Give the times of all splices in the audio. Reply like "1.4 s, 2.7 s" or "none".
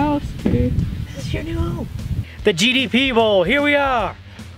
1.0 s, 2.2 s